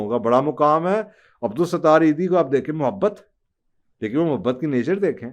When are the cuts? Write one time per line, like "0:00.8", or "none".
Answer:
none